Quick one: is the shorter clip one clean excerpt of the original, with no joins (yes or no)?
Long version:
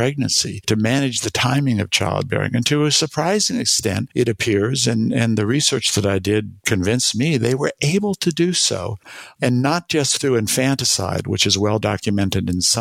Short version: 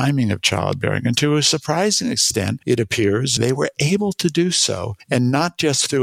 no